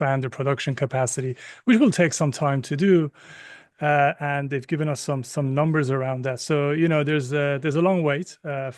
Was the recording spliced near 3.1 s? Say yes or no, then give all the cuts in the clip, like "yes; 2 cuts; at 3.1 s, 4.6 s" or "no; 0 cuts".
no; 0 cuts